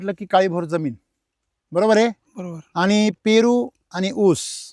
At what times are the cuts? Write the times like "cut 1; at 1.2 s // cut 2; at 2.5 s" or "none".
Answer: none